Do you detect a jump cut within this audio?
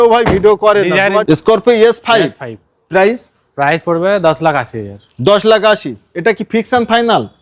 yes; 1 cut; at 1.2 s

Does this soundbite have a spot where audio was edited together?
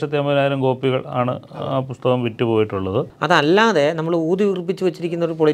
yes; 1 cut; at 3.1 s

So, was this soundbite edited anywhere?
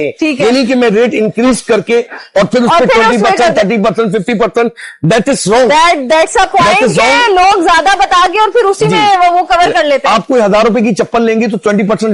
no; 0 cuts

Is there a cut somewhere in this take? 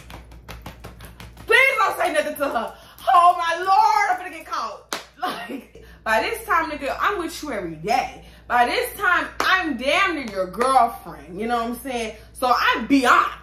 yes; 1 cut; at 5.8 s

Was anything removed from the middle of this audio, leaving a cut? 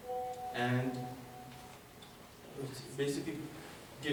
no; 0 cuts

